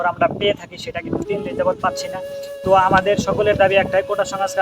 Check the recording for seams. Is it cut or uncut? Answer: cut